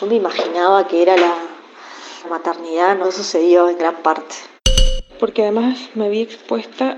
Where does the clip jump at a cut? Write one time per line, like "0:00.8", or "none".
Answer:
none

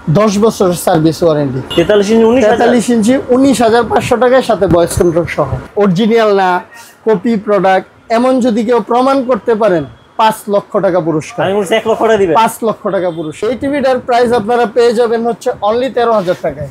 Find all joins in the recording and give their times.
0:01.6
0:05.6
0:13.4

